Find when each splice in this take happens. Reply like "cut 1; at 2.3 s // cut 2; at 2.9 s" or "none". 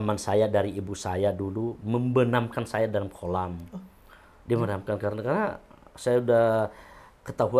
none